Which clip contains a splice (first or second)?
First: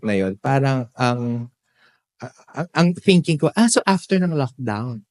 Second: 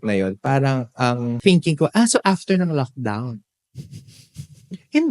second